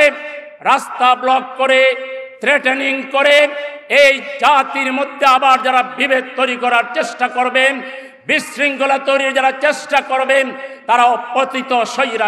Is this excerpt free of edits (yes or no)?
yes